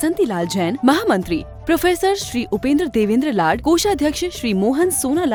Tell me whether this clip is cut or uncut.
uncut